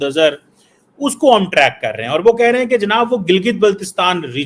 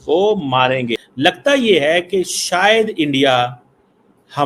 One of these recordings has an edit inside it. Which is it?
second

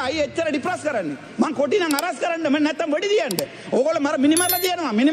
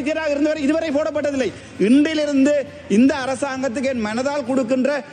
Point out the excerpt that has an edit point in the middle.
second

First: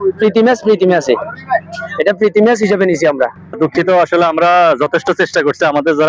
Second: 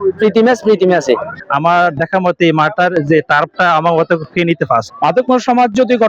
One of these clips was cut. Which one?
second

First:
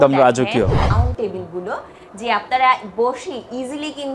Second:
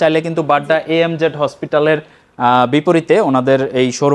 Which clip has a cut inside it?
first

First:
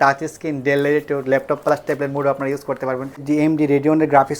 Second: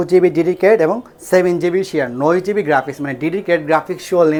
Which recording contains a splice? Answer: first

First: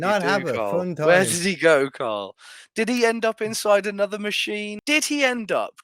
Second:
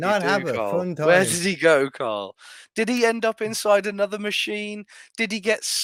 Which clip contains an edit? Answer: first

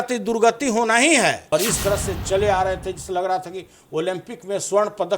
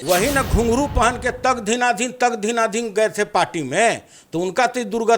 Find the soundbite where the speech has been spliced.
first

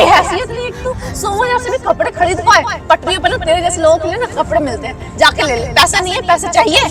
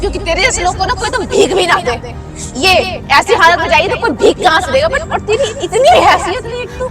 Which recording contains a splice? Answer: second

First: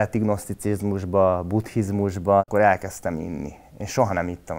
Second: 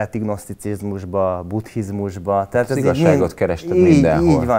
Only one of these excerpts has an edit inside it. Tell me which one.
first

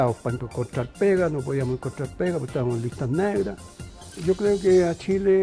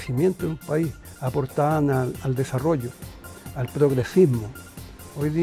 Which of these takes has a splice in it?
first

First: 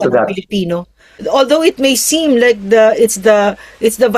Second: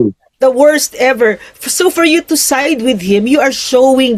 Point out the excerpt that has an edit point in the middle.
first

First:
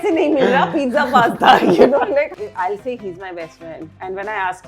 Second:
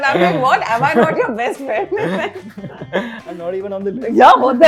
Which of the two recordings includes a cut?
first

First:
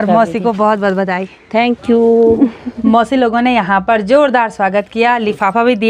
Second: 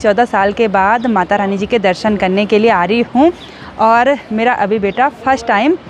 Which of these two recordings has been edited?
first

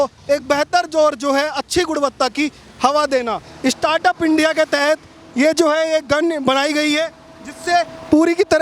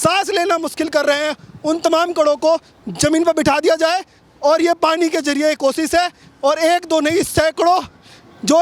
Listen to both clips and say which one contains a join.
first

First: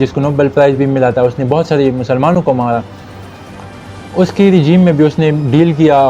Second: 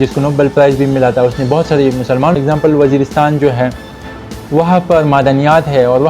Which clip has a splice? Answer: second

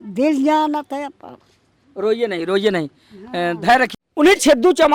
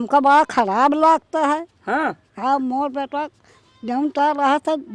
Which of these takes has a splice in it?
first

